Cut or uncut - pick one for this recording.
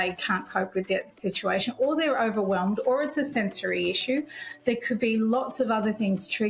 uncut